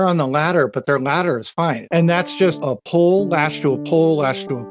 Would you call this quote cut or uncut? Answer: cut